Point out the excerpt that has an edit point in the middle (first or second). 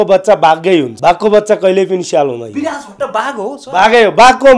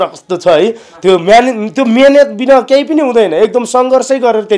first